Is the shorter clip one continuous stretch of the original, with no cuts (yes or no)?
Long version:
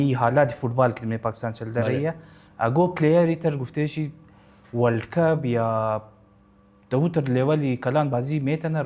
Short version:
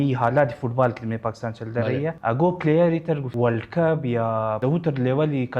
no